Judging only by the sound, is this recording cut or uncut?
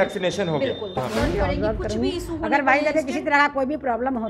cut